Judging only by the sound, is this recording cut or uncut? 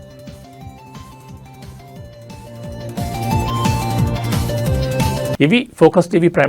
uncut